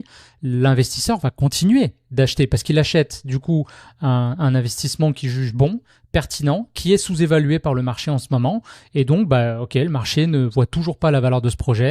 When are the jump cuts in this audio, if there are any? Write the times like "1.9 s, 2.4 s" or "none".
none